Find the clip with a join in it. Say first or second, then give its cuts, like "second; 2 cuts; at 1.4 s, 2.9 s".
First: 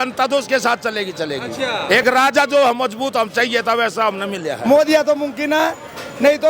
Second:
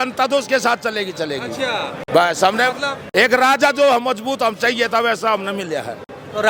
first; 2 cuts; at 1.8 s, 4.6 s